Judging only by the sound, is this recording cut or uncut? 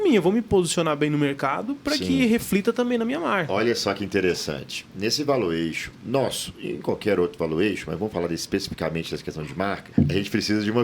cut